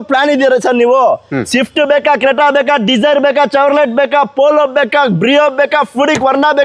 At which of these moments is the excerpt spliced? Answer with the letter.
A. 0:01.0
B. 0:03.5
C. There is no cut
C